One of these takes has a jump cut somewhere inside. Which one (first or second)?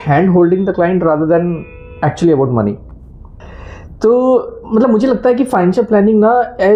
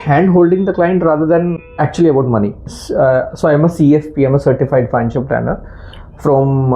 second